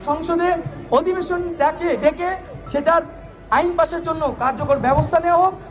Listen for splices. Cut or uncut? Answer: uncut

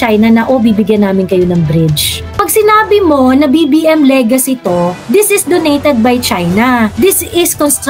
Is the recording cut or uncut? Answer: cut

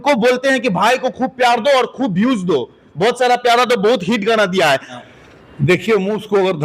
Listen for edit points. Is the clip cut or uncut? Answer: cut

